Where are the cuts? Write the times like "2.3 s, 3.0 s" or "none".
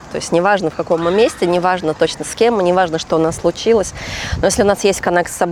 none